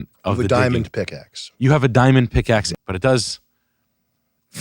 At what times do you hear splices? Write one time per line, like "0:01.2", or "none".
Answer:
0:02.7

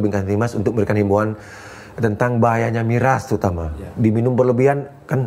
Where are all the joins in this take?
none

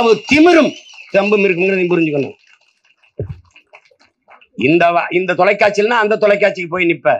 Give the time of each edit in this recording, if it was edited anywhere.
none

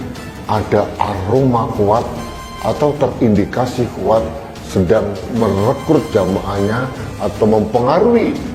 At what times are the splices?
none

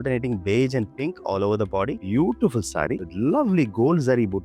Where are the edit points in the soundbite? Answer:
0:02.0

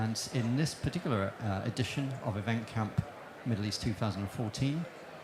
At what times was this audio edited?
none

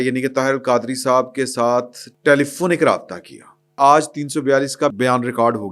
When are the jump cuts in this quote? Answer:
0:02.0
0:03.7
0:04.9

